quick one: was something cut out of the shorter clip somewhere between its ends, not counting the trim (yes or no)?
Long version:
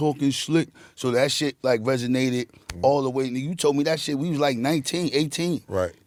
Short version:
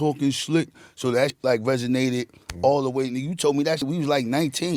yes